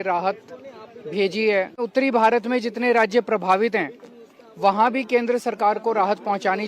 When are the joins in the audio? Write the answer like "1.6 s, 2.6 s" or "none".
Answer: 1.8 s